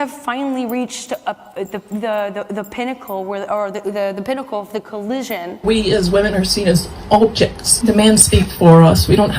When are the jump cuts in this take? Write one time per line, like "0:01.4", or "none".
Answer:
0:05.6
0:07.6

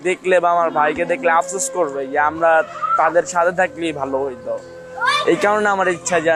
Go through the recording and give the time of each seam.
none

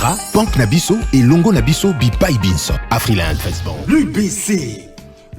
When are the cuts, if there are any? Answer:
0:03.5

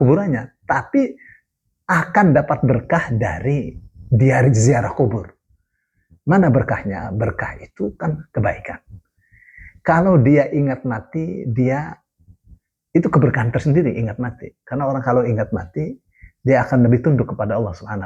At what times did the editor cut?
none

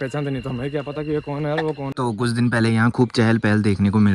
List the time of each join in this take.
0:01.9

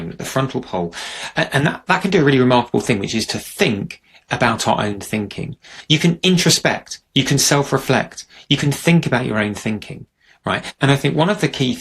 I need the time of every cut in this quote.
0:05.7
0:10.7

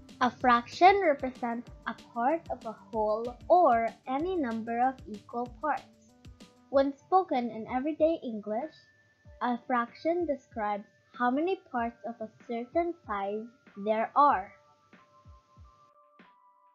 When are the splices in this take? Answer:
0:15.2

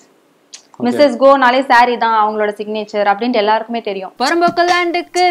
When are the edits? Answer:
0:04.0

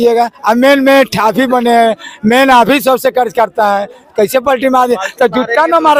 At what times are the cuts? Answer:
none

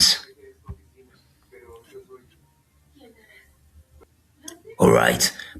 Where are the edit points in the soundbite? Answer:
0:03.8

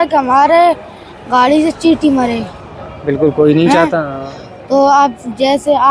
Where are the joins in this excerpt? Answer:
none

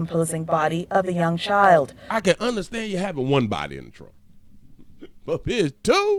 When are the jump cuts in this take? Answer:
none

